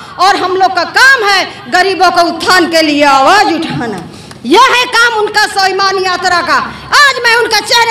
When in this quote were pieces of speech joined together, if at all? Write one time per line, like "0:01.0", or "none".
none